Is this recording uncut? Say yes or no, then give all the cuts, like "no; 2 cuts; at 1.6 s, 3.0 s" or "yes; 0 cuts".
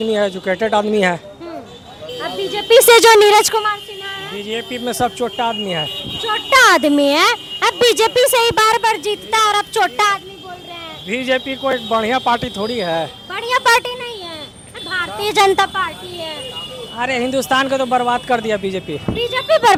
yes; 0 cuts